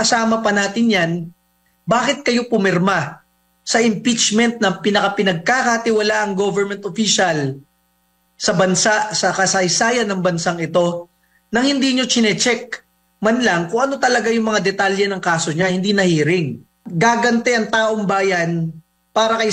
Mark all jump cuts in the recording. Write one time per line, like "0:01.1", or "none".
0:16.8